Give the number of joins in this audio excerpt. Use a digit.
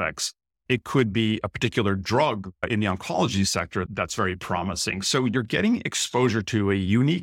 1